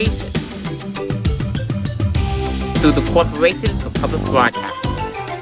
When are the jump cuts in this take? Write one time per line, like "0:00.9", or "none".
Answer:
0:04.5